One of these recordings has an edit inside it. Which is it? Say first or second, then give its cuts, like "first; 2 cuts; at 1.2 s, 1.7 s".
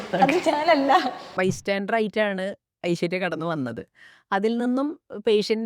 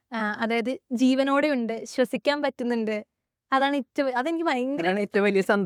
first; 1 cut; at 1.2 s